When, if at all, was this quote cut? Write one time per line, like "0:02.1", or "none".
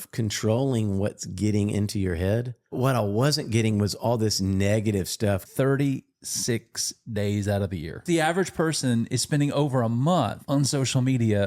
0:02.8
0:05.5
0:08.0
0:10.4